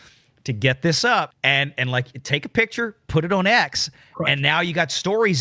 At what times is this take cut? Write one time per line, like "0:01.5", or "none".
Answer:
0:01.3